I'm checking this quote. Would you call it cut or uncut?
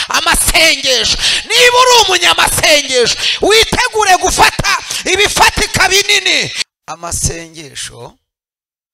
cut